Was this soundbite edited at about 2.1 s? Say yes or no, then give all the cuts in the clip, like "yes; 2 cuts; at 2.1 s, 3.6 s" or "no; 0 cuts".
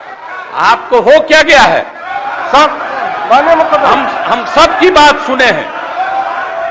no; 0 cuts